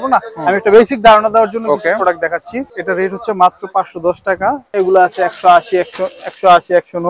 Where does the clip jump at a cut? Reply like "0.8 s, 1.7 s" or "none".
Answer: 2.8 s, 4.7 s